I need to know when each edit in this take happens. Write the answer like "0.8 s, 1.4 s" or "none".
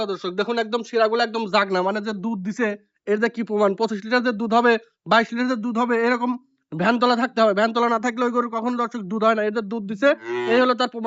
none